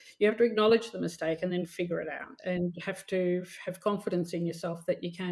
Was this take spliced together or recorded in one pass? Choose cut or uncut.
cut